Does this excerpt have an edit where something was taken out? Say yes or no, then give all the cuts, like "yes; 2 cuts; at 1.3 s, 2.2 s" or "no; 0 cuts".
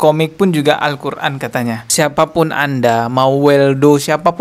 yes; 1 cut; at 1.8 s